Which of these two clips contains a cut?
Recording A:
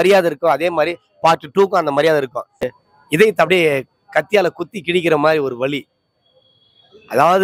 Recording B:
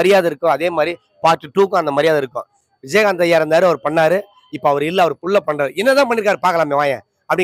A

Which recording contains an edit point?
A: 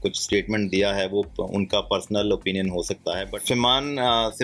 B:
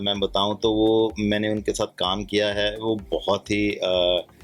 A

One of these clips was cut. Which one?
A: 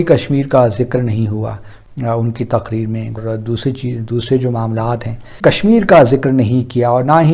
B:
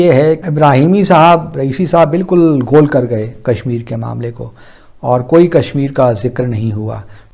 A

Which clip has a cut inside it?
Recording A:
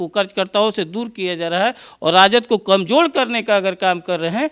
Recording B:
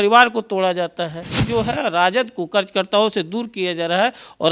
B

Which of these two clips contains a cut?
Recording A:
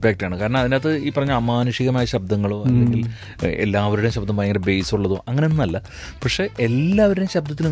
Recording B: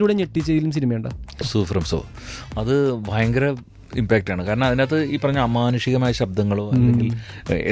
B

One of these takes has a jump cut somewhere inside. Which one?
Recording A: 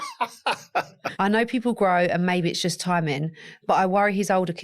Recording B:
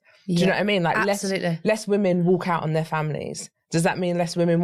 A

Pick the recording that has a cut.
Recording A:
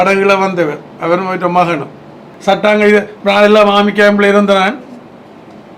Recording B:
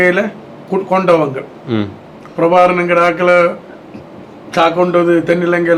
A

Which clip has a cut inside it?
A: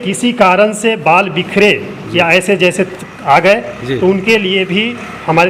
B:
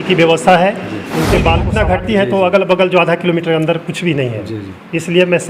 B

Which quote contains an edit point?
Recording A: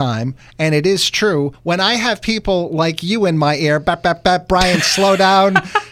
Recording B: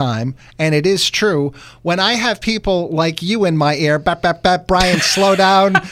A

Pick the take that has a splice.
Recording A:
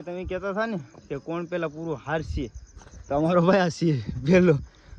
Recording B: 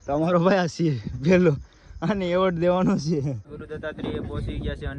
B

